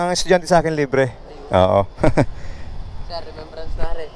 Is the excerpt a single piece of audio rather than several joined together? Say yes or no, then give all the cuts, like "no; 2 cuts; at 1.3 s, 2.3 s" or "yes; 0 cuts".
no; 1 cut; at 1.7 s